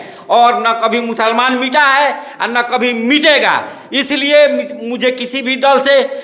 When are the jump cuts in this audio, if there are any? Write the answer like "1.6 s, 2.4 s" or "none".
none